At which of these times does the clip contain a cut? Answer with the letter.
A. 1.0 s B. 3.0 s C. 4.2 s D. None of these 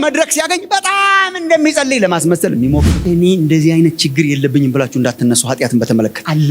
B